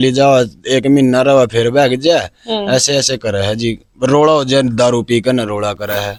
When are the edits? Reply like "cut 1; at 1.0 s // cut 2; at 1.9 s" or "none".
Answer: none